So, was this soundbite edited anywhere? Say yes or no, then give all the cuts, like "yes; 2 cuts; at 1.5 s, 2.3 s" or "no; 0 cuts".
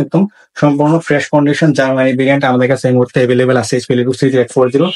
no; 0 cuts